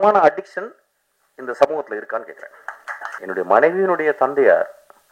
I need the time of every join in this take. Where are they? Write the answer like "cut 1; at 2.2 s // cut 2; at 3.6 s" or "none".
cut 1; at 3.2 s